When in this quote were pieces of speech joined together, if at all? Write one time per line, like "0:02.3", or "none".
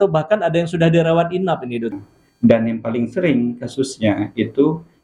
0:02.0

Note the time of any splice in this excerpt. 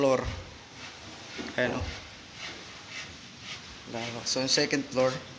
none

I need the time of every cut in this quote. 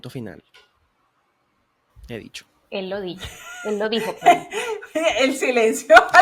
none

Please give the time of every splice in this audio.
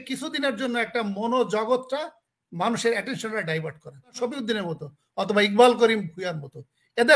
0:04.2

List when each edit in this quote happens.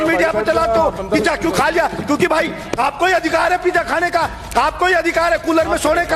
none

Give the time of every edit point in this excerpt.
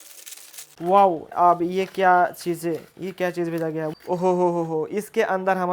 0:01.3
0:03.9

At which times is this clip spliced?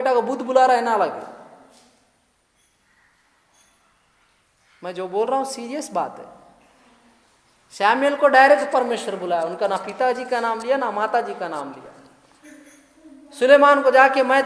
none

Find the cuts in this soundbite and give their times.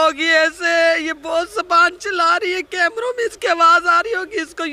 none

